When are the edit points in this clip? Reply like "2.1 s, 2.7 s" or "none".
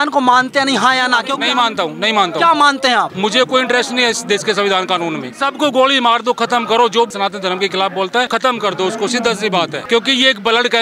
1.3 s, 3.1 s, 5.3 s, 7.1 s, 8.3 s, 9.8 s